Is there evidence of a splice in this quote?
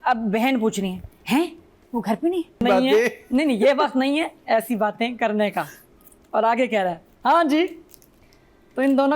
yes; 1 cut; at 2.6 s

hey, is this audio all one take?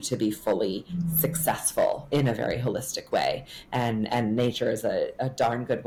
yes; 0 cuts

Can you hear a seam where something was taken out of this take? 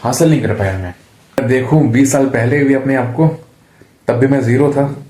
yes; 1 cut; at 1.4 s

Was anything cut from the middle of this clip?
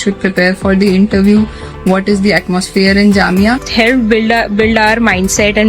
yes; 1 cut; at 3.7 s

